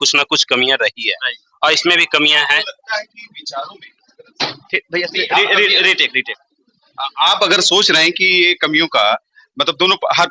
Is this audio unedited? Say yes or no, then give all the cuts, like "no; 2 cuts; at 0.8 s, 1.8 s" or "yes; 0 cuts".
yes; 0 cuts